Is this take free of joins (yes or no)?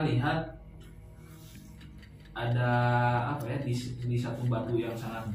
yes